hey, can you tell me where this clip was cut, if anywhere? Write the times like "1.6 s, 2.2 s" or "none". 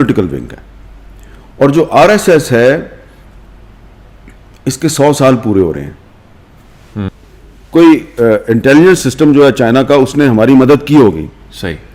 7.1 s